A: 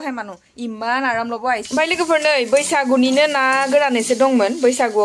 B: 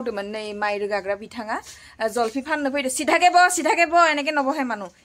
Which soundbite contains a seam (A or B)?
A